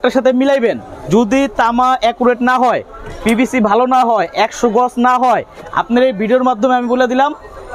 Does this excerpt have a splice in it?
no; 0 cuts

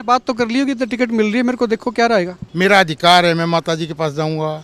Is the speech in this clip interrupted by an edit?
yes; 1 cut; at 2.4 s

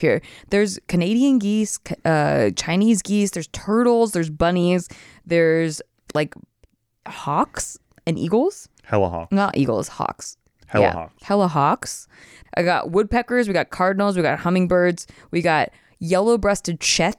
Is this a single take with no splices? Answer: no; 1 cut; at 12.3 s

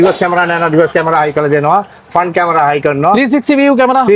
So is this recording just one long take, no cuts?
yes; 0 cuts

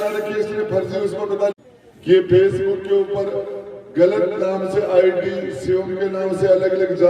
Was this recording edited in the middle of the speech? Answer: yes; 1 cut; at 1.6 s

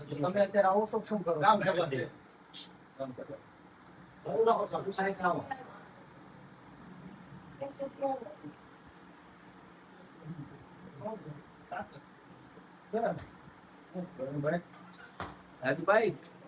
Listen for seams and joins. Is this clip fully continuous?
yes; 0 cuts

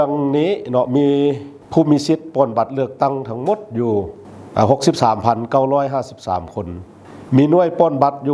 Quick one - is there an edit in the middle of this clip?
no; 0 cuts

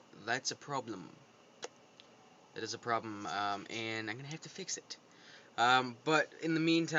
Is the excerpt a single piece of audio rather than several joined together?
no; 1 cut; at 3.6 s

